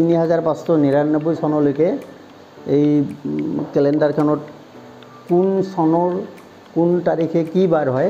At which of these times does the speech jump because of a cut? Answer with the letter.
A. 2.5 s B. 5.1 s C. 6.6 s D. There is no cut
D